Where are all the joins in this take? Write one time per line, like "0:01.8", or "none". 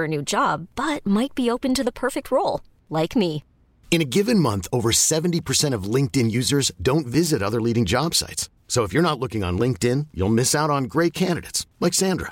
none